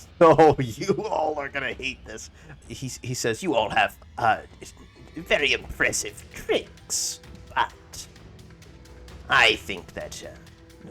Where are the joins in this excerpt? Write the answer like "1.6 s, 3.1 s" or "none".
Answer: 2.5 s